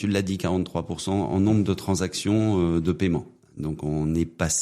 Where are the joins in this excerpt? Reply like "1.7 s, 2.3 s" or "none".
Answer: 3.4 s

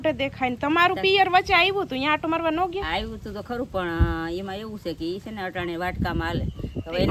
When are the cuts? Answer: none

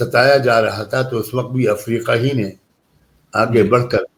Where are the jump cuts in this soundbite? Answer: none

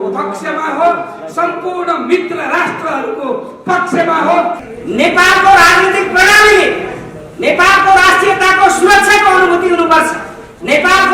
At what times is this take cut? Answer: 4.6 s

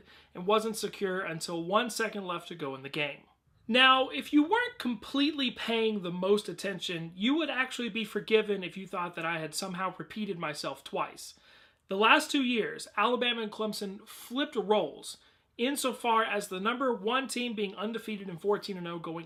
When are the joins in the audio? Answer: none

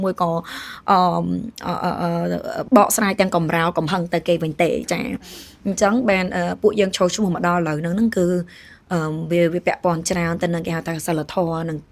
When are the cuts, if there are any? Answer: 2.6 s

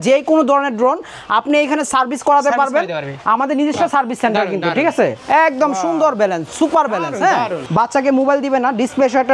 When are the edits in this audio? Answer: 5.2 s, 7.6 s

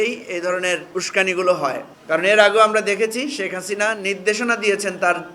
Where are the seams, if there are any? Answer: 0.9 s, 1.9 s

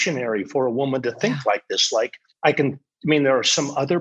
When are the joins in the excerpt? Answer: 2.2 s

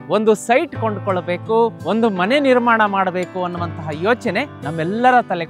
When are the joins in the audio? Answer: 1.8 s, 4.6 s

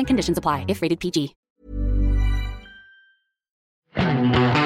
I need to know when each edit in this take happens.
3.7 s

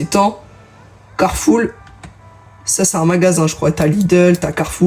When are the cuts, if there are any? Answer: none

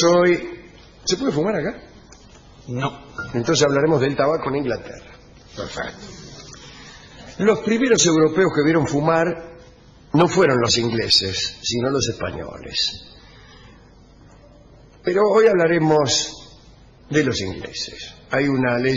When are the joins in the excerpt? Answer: none

